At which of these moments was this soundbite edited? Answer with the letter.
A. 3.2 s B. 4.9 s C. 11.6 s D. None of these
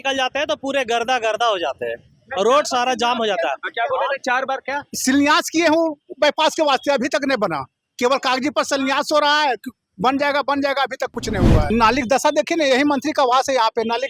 C